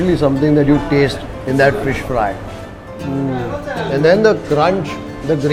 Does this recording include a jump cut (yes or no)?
no